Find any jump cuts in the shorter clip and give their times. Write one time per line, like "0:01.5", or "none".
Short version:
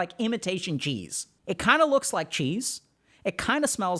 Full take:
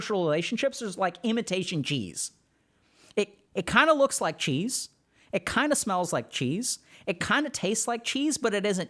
0:01.3